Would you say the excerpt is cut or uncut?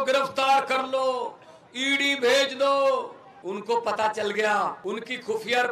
cut